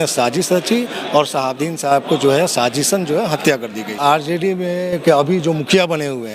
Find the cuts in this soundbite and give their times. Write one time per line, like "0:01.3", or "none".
0:04.0